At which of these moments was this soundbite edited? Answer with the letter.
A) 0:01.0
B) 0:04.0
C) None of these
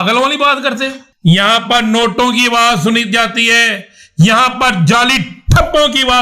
A